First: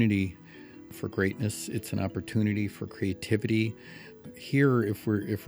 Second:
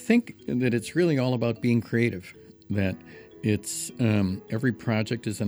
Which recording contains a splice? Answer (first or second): first